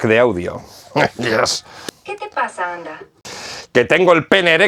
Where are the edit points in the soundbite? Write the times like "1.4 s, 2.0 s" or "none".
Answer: 1.7 s, 3.1 s